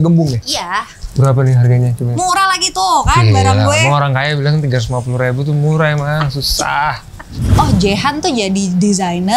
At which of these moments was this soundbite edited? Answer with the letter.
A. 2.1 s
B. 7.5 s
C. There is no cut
B